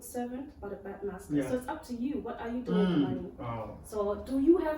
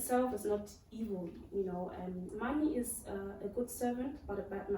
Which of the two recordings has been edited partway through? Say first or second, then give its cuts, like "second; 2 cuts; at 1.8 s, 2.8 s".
second; 1 cut; at 2.3 s